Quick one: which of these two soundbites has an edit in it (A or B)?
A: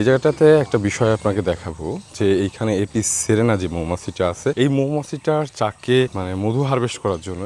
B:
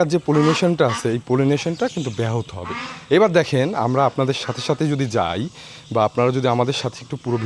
A